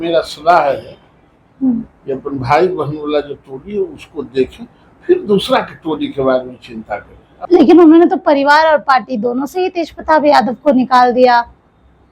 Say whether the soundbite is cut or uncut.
cut